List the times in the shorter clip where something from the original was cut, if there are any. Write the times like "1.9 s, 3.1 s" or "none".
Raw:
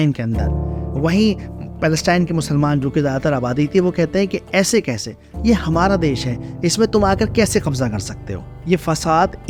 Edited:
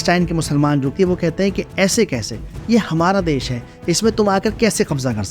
0.9 s

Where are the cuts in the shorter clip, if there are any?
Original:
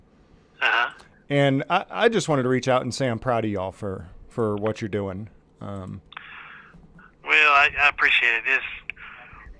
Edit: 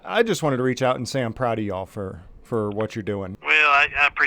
3.4 s

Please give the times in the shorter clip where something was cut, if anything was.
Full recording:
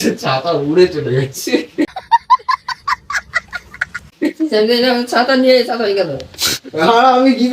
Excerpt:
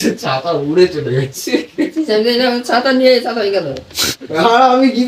1.8 s

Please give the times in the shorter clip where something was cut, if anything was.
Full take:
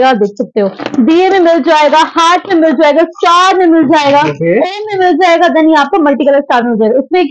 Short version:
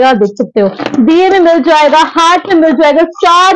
none

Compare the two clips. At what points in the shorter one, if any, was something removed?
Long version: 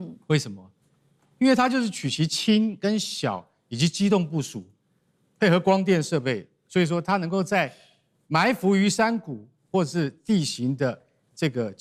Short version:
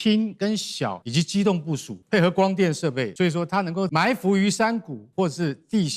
1.0 s, 1.9 s, 3.4 s, 5.0 s

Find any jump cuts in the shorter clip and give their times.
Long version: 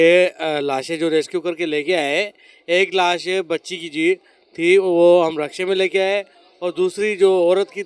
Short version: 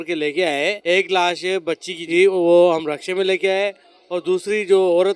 0.8 s, 1.9 s

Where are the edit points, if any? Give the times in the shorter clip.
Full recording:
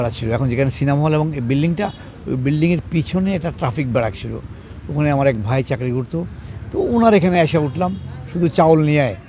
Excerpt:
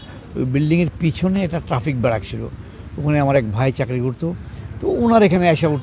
none

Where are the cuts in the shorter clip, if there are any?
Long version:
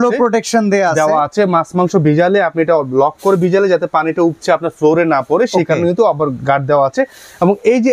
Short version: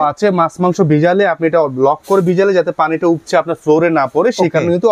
none

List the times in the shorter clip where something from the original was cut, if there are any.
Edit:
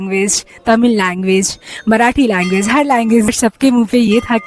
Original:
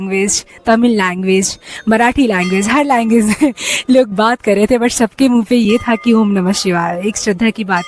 3.3 s

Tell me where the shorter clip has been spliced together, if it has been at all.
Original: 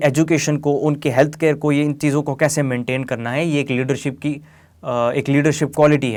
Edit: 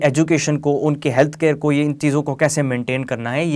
none

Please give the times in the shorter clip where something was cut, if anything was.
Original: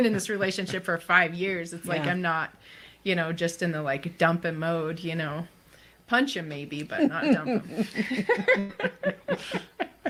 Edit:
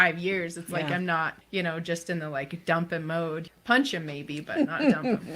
1.4 s, 3.5 s

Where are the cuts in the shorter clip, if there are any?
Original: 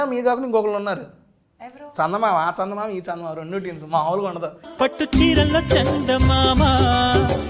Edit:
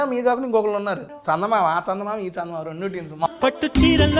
1.1 s, 3.3 s

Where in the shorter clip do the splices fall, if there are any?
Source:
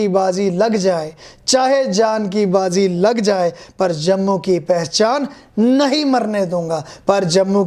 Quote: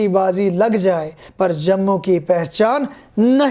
1.2 s

